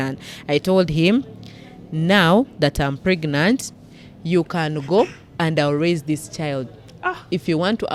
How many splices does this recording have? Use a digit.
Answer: 0